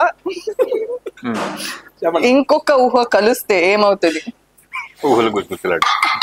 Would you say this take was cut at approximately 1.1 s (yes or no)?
no